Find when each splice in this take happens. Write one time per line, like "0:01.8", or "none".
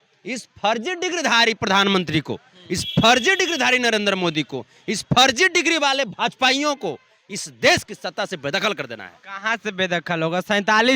none